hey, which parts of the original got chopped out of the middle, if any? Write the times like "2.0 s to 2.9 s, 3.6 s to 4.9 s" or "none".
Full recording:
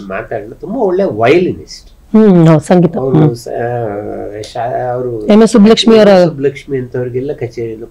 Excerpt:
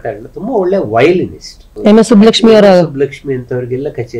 2.0 s to 5.1 s